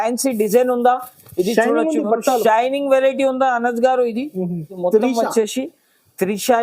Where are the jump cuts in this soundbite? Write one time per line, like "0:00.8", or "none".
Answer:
0:04.7

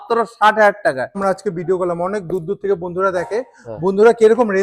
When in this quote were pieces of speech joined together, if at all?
0:01.2

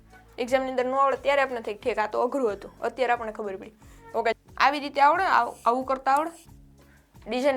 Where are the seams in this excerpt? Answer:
0:04.4

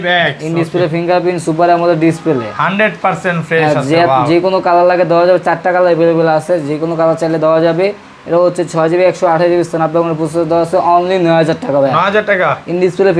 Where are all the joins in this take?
none

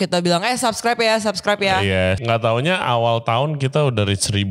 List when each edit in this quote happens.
0:02.2

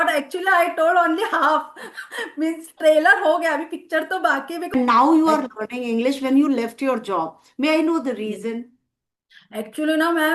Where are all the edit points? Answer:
0:04.7

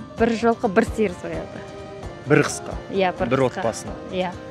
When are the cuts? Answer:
none

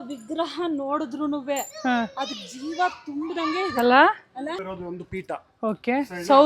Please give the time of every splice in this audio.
0:04.6

